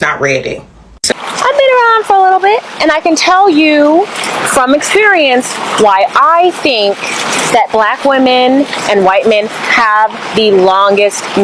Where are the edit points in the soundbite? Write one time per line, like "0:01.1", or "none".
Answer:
0:01.1